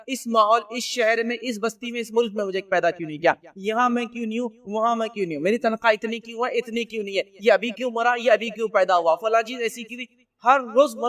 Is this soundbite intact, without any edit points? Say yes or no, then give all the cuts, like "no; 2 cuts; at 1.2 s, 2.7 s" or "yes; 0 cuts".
yes; 0 cuts